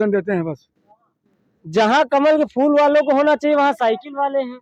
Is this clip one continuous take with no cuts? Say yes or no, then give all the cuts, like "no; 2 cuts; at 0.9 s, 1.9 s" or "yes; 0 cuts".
yes; 0 cuts